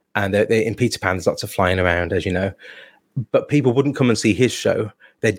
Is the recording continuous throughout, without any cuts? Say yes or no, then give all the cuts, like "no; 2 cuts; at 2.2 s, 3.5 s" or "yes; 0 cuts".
yes; 0 cuts